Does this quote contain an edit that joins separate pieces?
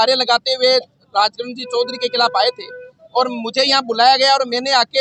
no; 0 cuts

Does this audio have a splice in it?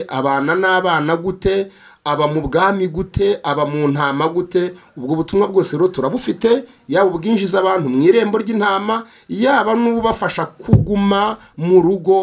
no; 0 cuts

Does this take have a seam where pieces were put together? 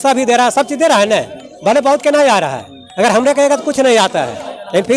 no; 0 cuts

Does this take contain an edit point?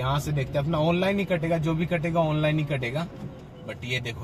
no; 0 cuts

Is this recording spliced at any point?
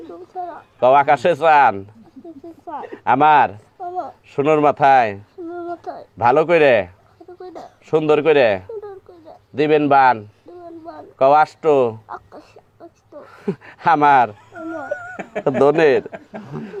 no; 0 cuts

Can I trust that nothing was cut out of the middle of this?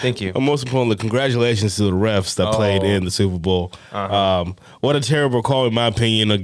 yes; 0 cuts

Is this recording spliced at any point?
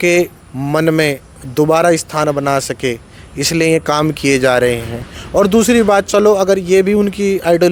no; 0 cuts

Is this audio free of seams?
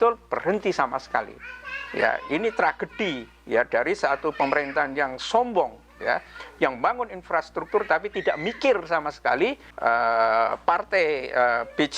no; 1 cut; at 9.7 s

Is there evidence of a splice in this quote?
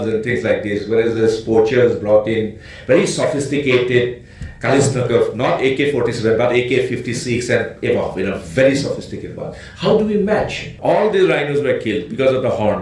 yes; 1 cut; at 10.7 s

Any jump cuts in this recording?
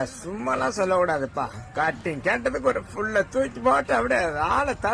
no; 0 cuts

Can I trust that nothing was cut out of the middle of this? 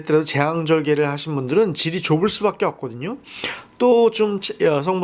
yes; 0 cuts

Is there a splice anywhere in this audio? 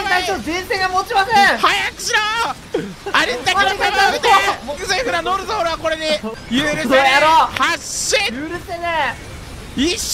yes; 2 cuts; at 4.8 s, 6.3 s

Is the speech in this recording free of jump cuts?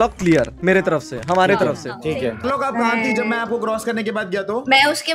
no; 1 cut; at 2.4 s

